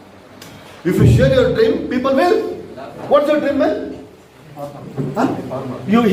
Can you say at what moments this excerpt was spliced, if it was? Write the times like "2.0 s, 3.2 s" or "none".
none

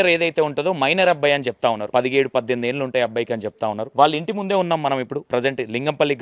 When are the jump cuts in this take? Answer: 1.8 s, 3.8 s, 5.2 s

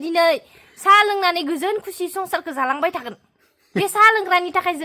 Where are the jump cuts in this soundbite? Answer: none

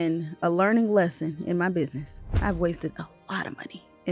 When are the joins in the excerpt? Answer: none

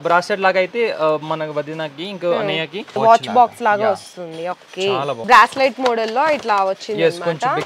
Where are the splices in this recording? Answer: 3.0 s, 5.2 s

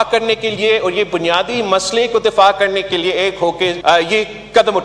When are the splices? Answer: 3.8 s

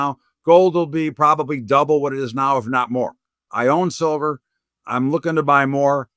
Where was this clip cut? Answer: 3.5 s

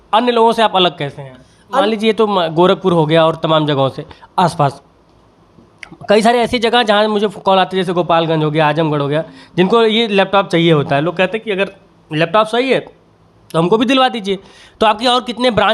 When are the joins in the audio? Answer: 1.8 s

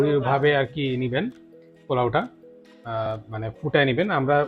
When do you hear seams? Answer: none

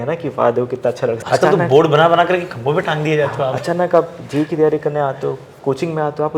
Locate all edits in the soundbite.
1.2 s

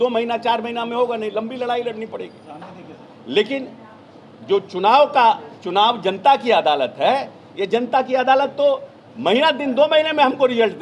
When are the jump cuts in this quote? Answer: none

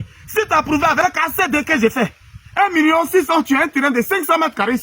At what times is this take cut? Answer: 1.0 s

